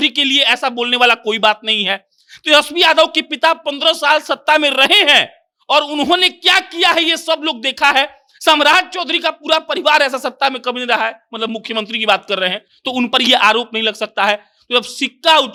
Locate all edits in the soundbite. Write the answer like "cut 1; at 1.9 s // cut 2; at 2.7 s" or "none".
none